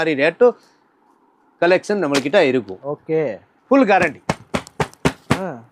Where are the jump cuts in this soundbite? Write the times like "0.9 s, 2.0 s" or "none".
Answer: 2.8 s